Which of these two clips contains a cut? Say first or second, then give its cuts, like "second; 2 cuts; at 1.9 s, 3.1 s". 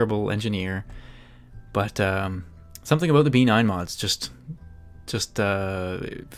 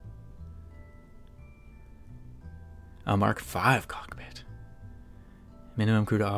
first; 1 cut; at 3.9 s